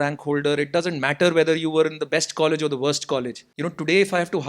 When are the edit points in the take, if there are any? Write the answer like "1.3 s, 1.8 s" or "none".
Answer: 3.4 s